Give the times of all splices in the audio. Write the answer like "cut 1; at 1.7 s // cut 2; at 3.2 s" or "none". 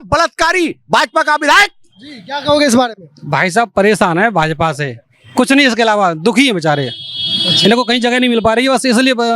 none